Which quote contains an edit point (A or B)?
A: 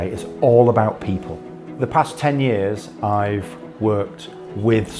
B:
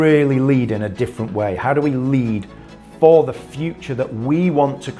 A